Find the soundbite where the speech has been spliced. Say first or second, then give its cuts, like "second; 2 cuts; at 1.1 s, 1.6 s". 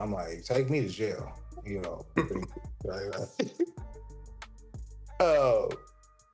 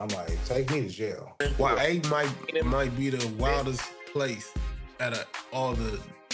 second; 1 cut; at 1.4 s